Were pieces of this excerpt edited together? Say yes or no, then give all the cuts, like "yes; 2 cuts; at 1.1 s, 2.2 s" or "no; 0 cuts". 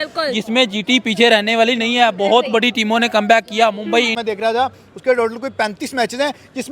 yes; 1 cut; at 4.1 s